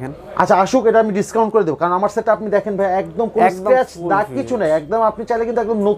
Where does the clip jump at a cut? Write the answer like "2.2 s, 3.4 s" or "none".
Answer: none